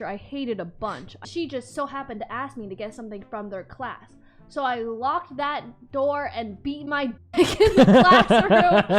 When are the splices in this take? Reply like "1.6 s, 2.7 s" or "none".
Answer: 1.2 s